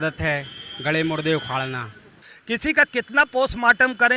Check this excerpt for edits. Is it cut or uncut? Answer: cut